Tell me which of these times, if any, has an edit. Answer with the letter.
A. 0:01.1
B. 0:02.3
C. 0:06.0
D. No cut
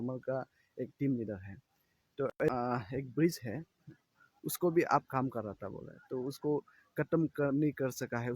B